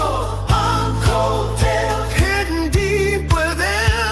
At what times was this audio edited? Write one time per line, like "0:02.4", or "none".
none